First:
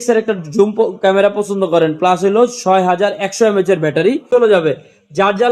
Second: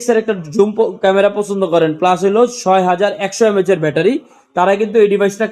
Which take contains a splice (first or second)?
first